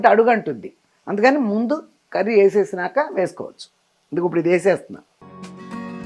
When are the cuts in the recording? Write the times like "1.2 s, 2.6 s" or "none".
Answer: none